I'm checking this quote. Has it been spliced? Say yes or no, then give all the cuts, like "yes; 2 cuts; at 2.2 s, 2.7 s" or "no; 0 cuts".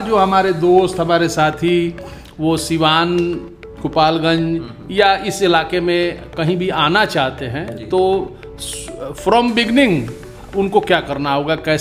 no; 0 cuts